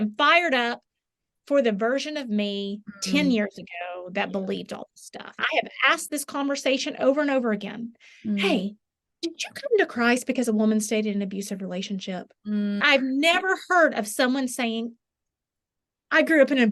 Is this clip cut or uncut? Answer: cut